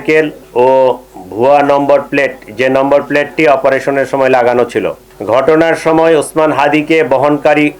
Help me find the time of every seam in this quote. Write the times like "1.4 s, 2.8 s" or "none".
none